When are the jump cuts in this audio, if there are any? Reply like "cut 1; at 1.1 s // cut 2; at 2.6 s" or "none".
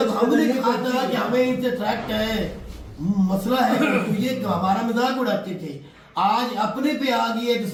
none